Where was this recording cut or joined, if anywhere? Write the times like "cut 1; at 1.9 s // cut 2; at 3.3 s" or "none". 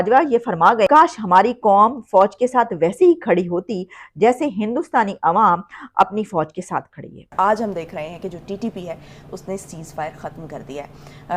cut 1; at 0.9 s // cut 2; at 7.2 s